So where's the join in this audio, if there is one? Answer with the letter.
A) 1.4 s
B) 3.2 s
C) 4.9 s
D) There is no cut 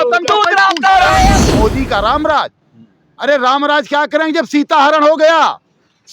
A